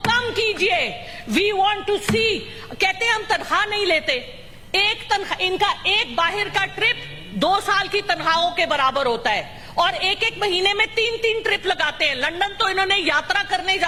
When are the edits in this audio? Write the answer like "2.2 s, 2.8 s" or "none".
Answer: none